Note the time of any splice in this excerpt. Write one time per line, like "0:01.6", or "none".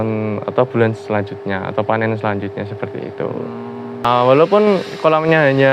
0:04.0